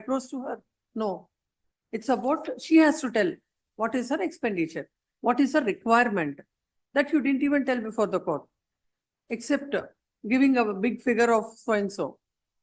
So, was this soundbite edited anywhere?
no; 0 cuts

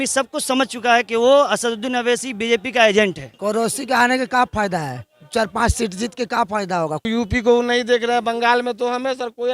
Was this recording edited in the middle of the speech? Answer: yes; 2 cuts; at 3.3 s, 7.1 s

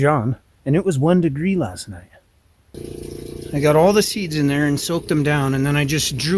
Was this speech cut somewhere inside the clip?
yes; 1 cut; at 2.7 s

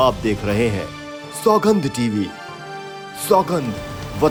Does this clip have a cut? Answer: no; 0 cuts

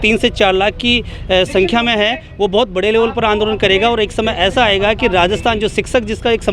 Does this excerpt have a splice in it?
no; 0 cuts

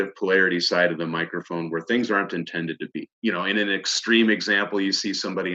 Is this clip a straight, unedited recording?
no; 1 cut; at 3.1 s

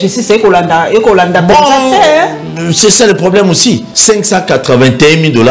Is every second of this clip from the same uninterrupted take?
no; 1 cut; at 3.9 s

